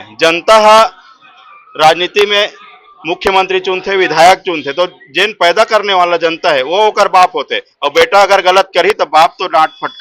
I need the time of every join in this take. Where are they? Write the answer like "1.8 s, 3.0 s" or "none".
none